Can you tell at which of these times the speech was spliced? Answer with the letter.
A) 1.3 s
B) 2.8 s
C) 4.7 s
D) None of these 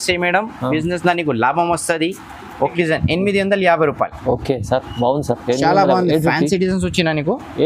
B